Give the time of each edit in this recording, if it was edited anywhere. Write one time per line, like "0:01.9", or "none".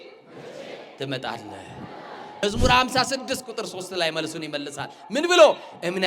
0:02.4